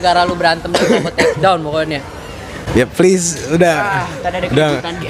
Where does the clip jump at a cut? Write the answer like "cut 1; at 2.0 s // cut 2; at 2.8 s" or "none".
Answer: none